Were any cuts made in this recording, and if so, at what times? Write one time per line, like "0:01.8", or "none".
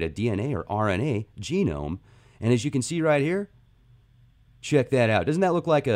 0:03.2